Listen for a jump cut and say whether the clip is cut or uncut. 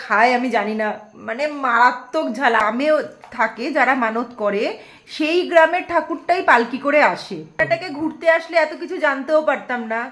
cut